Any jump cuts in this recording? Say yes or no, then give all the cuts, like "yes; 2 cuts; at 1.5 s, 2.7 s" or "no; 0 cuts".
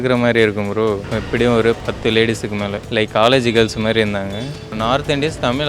yes; 4 cuts; at 1.0 s, 1.8 s, 2.8 s, 4.7 s